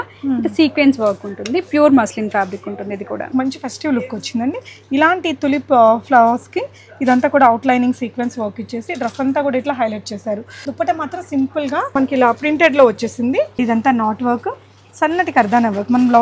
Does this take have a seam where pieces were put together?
yes; 4 cuts; at 3.3 s, 10.6 s, 12.0 s, 13.6 s

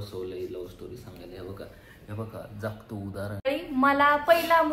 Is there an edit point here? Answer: yes; 1 cut; at 3.5 s

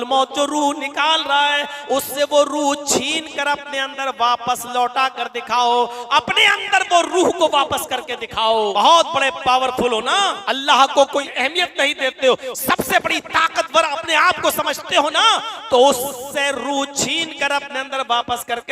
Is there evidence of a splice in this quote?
yes; 3 cuts; at 8.7 s, 10.4 s, 11.3 s

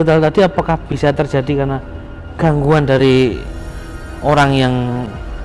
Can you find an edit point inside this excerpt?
no; 0 cuts

